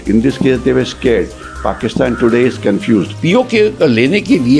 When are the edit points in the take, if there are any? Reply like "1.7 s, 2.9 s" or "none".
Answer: 3.1 s